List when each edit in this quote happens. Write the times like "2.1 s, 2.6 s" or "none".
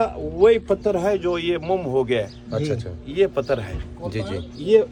none